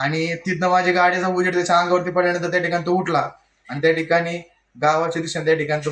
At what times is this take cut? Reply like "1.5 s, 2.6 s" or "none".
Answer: none